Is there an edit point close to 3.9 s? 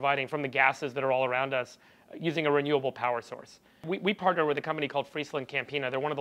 yes; 1 cut; at 3.9 s

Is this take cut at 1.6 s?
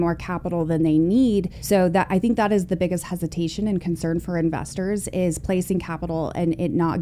yes; 1 cut; at 1.6 s

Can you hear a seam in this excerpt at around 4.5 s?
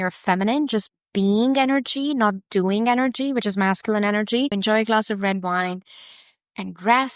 yes; 1 cut; at 4.5 s

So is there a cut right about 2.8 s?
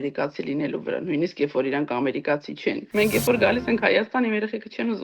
yes; 1 cut; at 2.8 s

